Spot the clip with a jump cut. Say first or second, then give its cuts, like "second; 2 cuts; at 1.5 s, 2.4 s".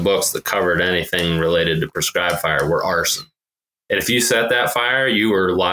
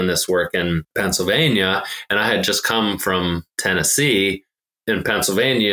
second; 3 cuts; at 0.9 s, 3.5 s, 4.7 s